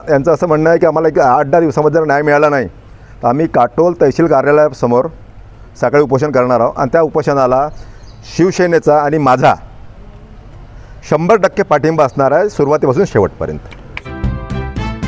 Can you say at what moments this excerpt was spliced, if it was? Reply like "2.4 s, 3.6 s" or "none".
13.7 s